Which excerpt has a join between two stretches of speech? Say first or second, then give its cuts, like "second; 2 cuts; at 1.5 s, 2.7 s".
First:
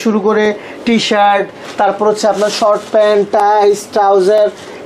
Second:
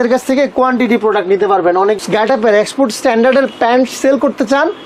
second; 1 cut; at 2.0 s